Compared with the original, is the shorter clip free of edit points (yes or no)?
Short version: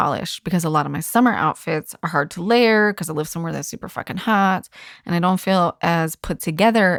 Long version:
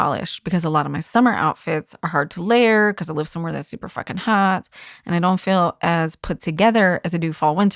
yes